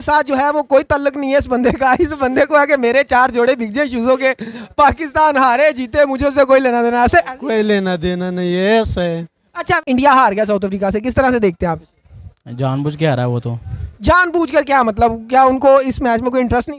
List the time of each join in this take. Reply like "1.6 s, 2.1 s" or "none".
9.8 s, 13.9 s